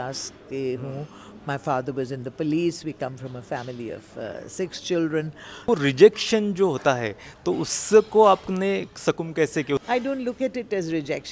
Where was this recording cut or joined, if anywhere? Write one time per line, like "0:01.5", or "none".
0:05.7
0:09.8